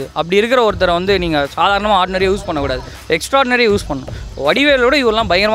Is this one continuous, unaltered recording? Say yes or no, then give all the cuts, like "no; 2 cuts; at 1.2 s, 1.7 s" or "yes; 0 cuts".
yes; 0 cuts